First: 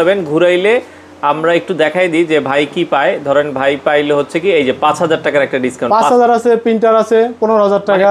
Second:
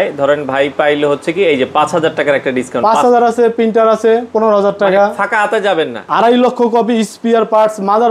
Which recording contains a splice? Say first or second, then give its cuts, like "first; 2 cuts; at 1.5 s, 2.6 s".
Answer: second; 1 cut; at 6.0 s